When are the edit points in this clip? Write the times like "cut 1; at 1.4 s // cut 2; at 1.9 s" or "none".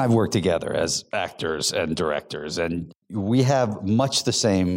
cut 1; at 2.9 s

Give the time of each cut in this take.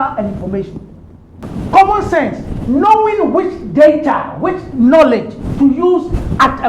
cut 1; at 1.4 s

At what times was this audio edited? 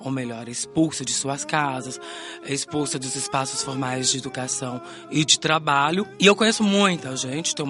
cut 1; at 6.1 s

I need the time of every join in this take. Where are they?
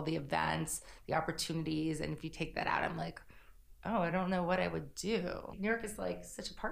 cut 1; at 5.5 s

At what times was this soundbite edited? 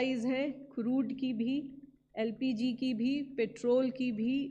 none

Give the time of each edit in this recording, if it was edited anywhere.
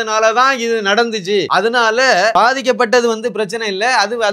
cut 1; at 1.5 s // cut 2; at 2.3 s

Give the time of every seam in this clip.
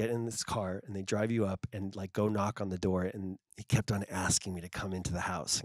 cut 1; at 3.4 s

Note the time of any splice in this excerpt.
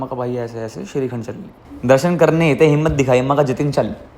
cut 1; at 1.6 s

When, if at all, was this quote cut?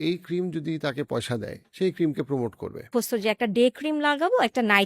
cut 1; at 1.6 s // cut 2; at 2.9 s

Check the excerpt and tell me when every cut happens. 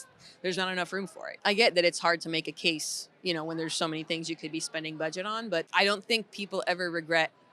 cut 1; at 1.3 s // cut 2; at 5.7 s

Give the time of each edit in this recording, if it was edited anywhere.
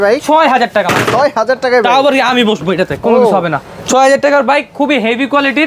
none

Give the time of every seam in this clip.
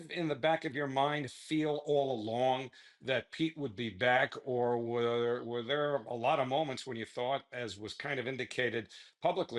none

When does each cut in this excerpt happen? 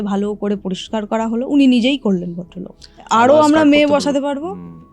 cut 1; at 3.0 s

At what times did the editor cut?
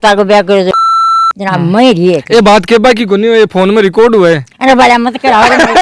none

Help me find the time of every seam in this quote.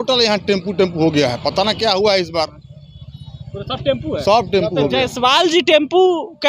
none

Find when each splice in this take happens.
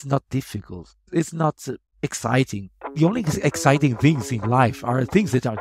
cut 1; at 1.0 s // cut 2; at 2.8 s

